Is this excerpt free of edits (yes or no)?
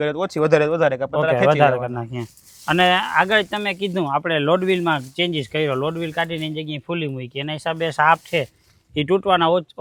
yes